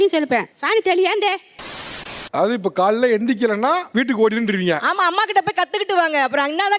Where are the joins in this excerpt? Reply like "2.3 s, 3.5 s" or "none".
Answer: 1.7 s